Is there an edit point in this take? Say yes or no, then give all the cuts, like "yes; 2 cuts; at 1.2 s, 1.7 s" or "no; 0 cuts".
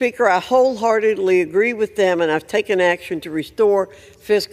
yes; 1 cut; at 3.0 s